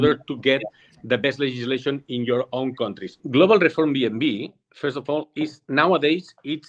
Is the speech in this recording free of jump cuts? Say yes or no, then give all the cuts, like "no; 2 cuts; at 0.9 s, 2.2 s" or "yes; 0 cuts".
no; 1 cut; at 3.2 s